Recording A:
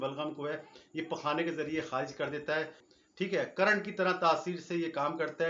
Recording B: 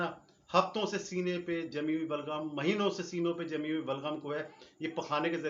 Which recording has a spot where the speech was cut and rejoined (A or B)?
A